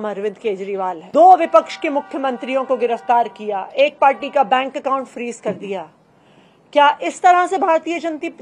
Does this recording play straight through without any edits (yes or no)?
no